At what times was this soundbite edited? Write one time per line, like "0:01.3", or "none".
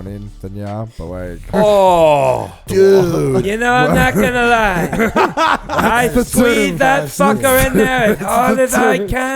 0:01.5
0:02.5
0:03.4